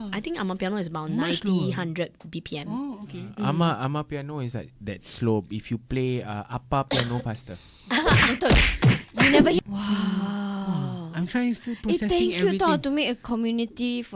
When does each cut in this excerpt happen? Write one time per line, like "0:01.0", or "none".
0:09.6

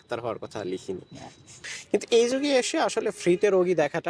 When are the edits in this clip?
0:01.7

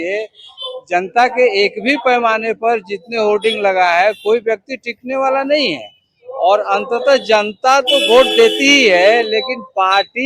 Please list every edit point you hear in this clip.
none

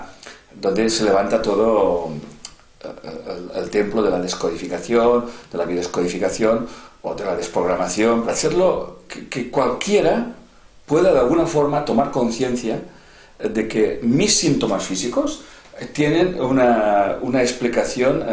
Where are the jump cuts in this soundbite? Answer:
0:08.3

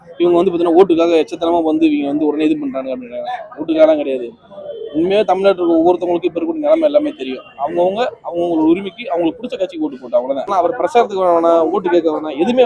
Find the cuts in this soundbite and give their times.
0:10.5

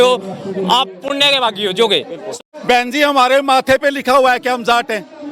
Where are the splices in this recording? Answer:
0:02.3

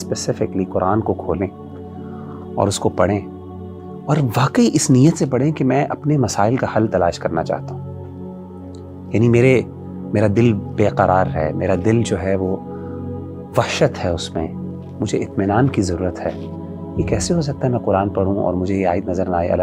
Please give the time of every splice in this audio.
none

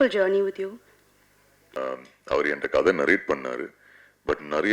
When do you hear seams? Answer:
0:01.8

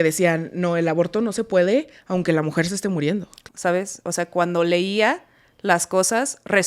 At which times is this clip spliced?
0:03.3

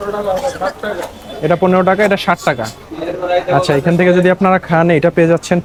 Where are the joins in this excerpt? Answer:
none

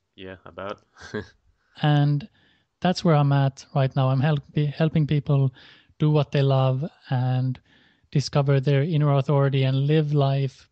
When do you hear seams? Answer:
0:09.5

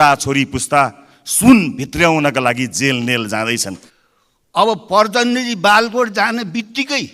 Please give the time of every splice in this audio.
0:03.9

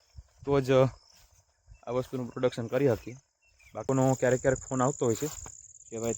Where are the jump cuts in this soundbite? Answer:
0:03.8

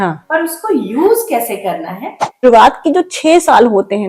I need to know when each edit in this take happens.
0:02.3

